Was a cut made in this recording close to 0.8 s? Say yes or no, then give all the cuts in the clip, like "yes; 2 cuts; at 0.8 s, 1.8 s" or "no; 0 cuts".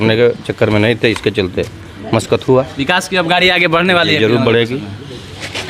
no; 0 cuts